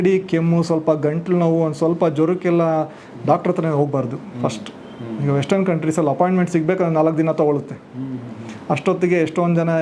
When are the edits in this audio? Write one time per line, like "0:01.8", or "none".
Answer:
none